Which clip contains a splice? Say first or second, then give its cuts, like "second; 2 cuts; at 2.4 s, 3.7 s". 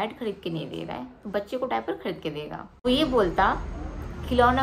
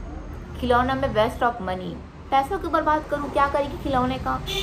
first; 1 cut; at 2.7 s